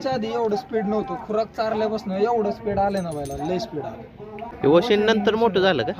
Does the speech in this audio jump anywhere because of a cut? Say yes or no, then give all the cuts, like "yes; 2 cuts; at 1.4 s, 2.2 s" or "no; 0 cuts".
yes; 1 cut; at 4.5 s